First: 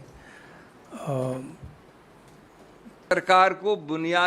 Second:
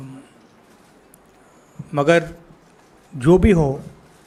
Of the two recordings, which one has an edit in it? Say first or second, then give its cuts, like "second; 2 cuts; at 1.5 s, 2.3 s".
first; 1 cut; at 3.0 s